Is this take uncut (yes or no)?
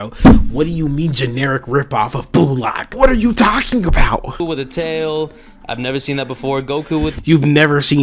no